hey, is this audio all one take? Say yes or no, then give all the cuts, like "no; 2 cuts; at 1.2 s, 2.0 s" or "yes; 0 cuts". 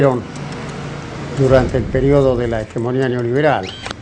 no; 1 cut; at 2.2 s